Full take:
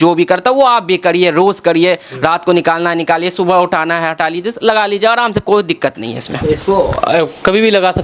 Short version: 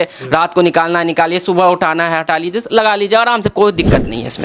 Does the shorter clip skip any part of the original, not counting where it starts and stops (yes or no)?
no